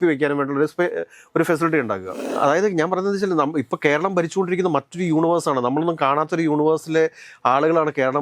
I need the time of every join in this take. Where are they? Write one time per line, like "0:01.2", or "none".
0:02.3